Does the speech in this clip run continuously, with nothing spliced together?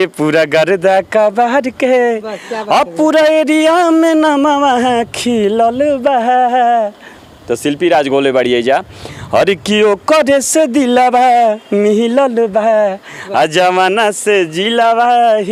yes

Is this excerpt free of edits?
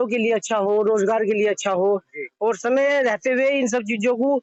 yes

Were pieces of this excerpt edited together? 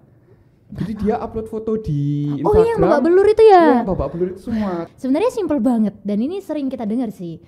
yes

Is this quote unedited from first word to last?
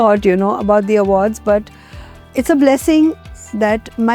no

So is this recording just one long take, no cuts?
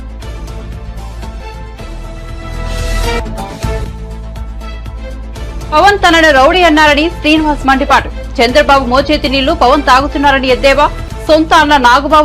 no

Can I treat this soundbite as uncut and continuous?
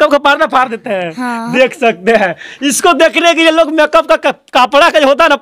yes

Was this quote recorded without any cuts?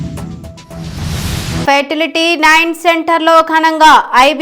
no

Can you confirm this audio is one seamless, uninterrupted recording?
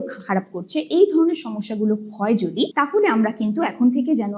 no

